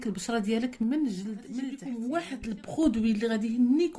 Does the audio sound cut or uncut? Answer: cut